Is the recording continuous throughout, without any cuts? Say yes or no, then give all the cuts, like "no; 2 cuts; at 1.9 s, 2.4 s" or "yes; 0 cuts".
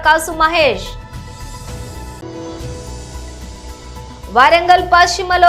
yes; 0 cuts